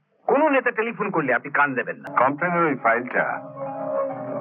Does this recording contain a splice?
yes; 1 cut; at 2.0 s

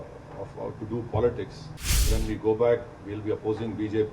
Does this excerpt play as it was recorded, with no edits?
no; 1 cut; at 2.0 s

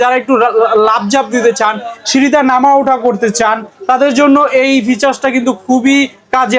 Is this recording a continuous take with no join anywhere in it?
yes; 0 cuts

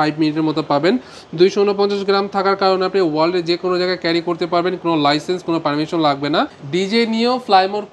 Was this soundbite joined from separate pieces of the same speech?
yes; 1 cut; at 6.6 s

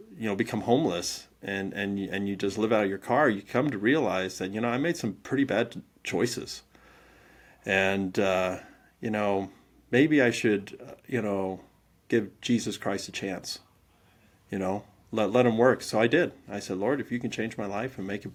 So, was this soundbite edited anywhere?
no; 0 cuts

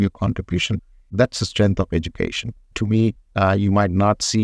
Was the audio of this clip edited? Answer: yes; 2 cuts; at 0.8 s, 3.2 s

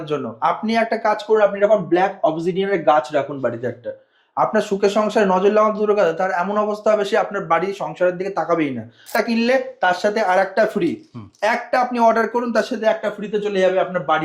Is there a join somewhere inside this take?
yes; 1 cut; at 9.1 s

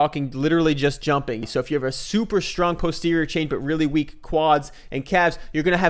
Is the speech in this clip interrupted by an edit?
yes; 1 cut; at 1.4 s

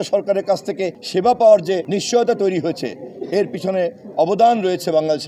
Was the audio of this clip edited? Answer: yes; 2 cuts; at 1.0 s, 1.8 s

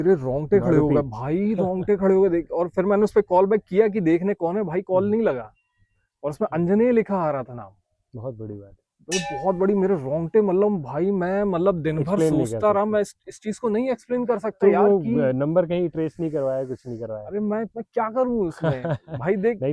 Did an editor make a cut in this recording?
no; 0 cuts

